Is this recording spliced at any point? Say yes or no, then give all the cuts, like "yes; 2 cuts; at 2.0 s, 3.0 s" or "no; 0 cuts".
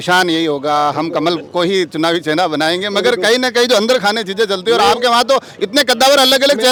no; 0 cuts